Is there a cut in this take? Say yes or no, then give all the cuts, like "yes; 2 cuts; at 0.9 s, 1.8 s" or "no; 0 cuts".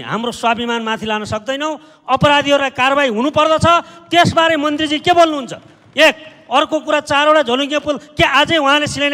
no; 0 cuts